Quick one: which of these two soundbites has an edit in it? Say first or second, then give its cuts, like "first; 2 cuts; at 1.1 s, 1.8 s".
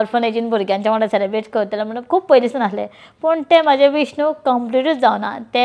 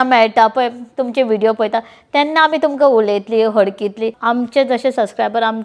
second; 1 cut; at 4.2 s